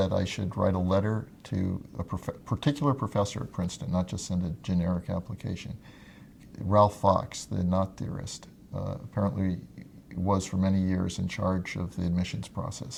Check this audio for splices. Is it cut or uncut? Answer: uncut